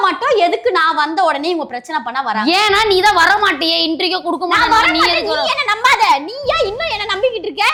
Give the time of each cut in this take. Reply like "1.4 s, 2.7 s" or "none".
none